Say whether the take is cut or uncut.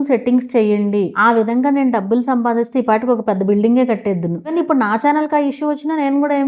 cut